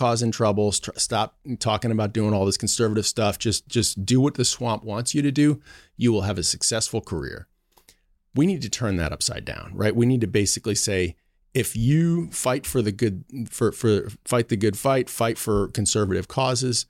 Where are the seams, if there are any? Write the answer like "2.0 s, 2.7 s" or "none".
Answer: none